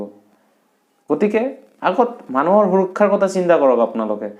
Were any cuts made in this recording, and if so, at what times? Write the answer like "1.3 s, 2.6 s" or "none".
none